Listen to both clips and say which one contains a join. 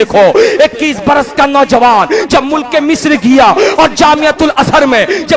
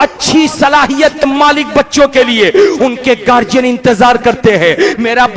second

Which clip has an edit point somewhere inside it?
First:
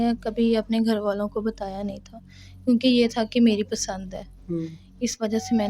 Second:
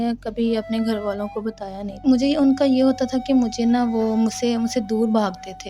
second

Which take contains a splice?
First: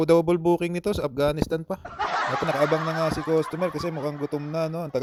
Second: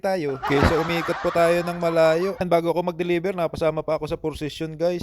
second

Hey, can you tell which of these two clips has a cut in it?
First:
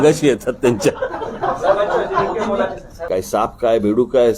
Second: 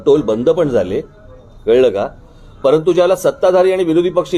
first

